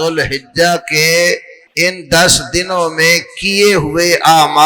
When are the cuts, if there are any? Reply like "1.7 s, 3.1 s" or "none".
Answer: 1.6 s